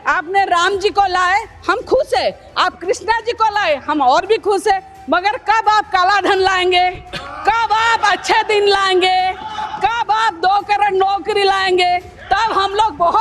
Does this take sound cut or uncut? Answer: uncut